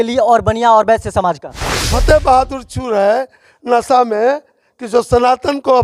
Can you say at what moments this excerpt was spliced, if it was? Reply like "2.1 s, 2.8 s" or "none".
1.8 s